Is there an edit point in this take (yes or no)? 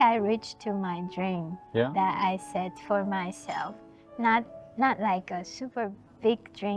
no